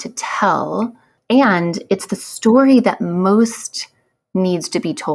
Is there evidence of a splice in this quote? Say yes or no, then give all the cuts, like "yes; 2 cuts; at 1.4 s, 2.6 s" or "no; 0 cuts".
yes; 1 cut; at 1.1 s